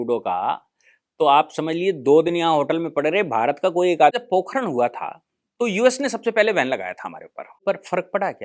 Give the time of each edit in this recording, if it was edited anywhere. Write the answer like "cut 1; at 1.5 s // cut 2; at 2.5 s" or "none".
cut 1; at 4.1 s // cut 2; at 7.6 s